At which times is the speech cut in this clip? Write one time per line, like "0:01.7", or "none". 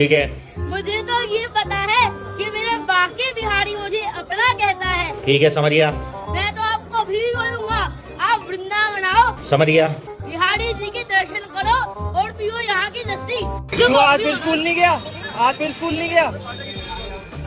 none

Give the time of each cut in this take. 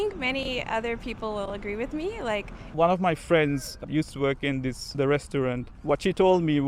0:02.7
0:03.8
0:04.8

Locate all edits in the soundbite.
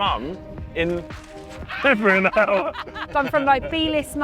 0:03.1

